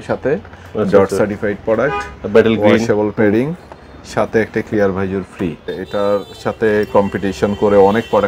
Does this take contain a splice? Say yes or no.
yes